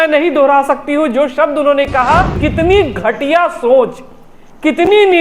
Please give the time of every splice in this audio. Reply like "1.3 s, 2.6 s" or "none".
2.4 s